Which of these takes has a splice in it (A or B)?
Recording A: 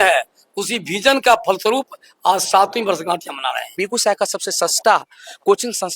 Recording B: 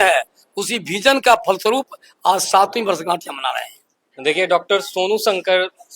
A